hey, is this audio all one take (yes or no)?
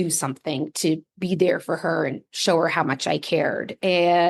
yes